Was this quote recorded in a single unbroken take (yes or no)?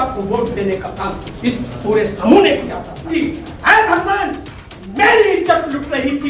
no